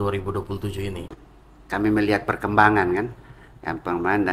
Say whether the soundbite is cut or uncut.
cut